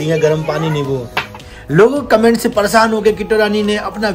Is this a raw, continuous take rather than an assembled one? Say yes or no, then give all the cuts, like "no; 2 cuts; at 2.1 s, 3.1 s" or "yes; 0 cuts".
no; 1 cut; at 1.4 s